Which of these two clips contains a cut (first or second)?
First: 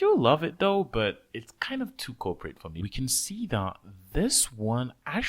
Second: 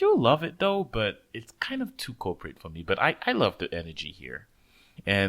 first